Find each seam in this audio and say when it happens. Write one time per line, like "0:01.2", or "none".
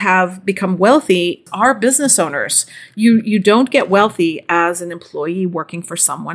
0:01.4